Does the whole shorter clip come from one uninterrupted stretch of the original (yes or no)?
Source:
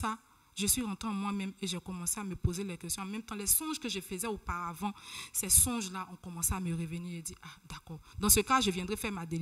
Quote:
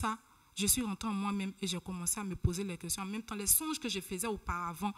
yes